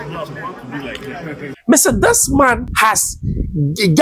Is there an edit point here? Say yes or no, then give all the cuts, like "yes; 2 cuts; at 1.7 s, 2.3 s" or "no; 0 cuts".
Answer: yes; 2 cuts; at 1.5 s, 2.7 s